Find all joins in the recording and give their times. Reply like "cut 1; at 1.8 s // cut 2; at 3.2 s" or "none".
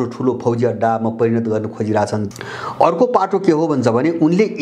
cut 1; at 2.3 s